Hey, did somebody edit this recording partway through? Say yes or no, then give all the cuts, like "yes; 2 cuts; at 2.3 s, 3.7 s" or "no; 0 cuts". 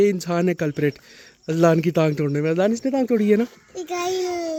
no; 0 cuts